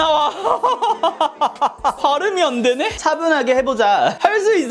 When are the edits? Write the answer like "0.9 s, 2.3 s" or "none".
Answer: 2.0 s, 2.9 s